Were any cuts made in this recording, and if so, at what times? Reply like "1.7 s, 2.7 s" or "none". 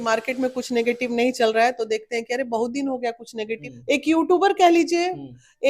3.6 s